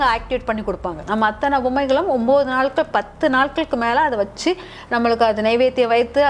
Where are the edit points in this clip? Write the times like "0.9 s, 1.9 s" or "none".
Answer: 1.0 s